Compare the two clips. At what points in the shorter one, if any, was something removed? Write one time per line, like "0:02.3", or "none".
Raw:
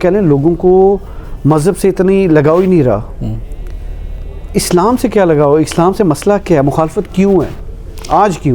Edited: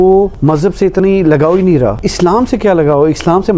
0:00.8
0:02.0